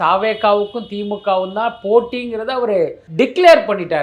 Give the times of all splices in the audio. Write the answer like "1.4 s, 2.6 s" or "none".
3.0 s